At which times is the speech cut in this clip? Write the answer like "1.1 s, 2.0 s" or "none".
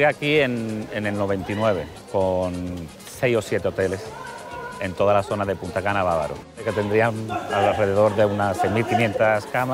2.0 s, 6.7 s